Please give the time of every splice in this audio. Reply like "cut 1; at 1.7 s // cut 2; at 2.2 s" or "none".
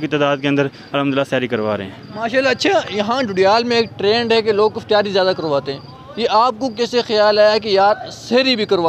none